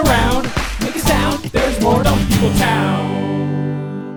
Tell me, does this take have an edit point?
no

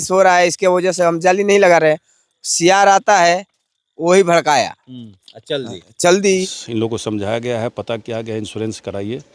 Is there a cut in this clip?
yes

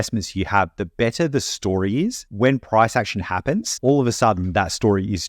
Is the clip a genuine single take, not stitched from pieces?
no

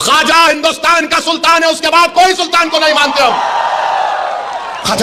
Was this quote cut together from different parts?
no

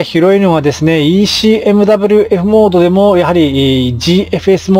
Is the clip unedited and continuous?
yes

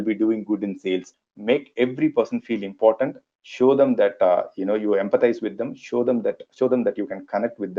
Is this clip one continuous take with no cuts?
no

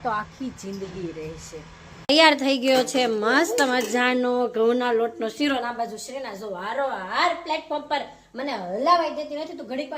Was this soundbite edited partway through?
yes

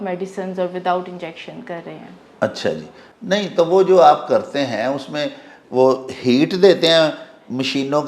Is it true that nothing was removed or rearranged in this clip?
yes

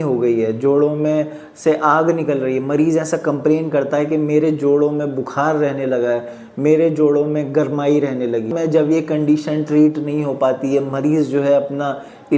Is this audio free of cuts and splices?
no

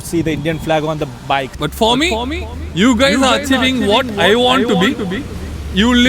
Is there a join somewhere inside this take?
yes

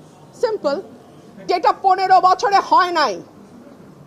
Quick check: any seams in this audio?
yes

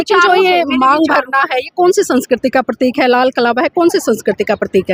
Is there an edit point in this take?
no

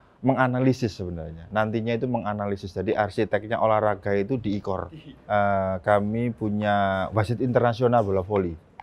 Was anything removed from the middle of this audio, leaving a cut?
yes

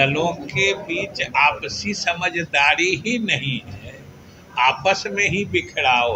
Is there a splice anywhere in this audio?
no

